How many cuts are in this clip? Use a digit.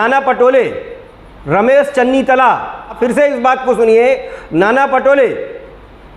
1